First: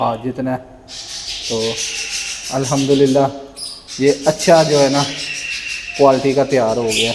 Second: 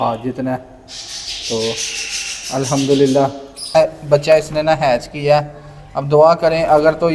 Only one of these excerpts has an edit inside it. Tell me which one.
second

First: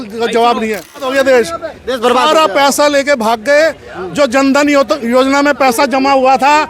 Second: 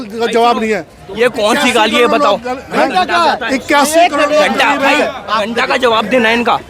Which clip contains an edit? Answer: first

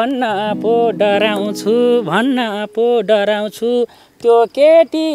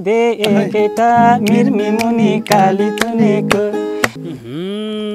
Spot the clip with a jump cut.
second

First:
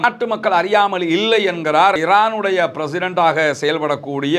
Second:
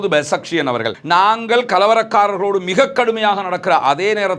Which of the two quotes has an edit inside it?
second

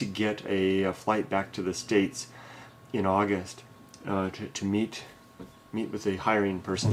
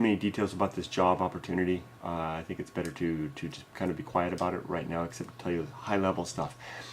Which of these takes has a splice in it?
second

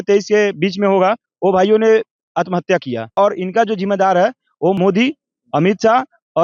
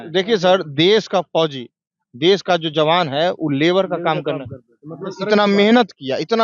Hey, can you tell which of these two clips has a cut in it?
first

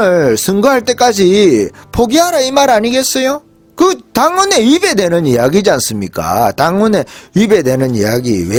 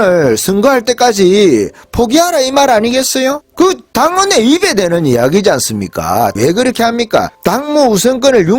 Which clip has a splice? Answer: second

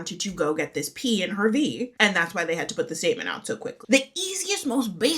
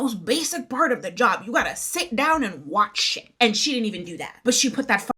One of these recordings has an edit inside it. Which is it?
first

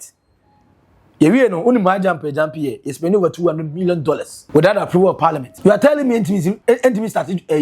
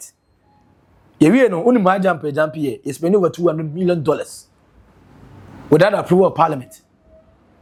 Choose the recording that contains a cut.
first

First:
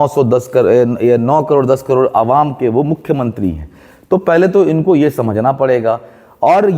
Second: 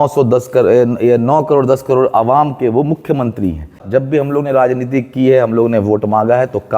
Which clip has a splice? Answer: second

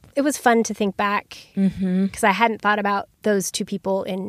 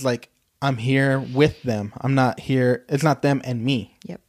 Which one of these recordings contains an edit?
first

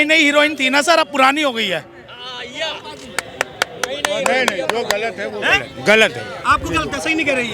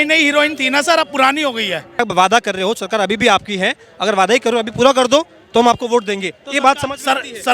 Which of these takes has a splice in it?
second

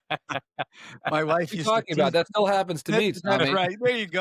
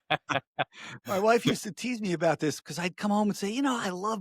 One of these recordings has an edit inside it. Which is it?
second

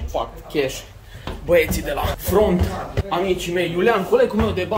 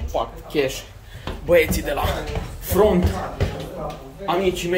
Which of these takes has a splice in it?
first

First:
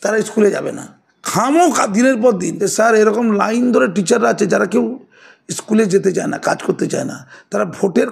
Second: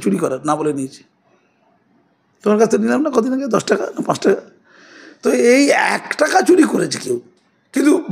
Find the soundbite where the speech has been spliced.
first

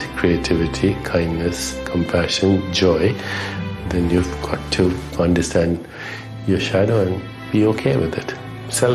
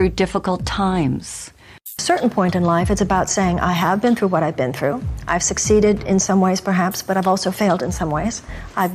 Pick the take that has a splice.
second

